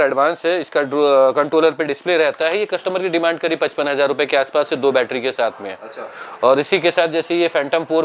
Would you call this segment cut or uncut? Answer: uncut